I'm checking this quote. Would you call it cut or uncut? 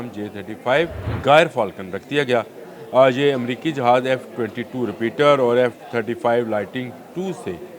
cut